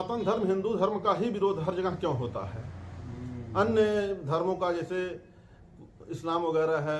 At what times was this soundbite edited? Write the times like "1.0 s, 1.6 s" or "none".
none